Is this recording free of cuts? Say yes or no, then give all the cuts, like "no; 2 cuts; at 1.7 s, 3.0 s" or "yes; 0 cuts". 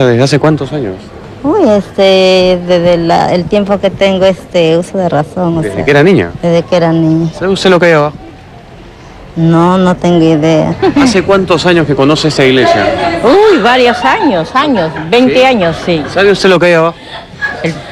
yes; 0 cuts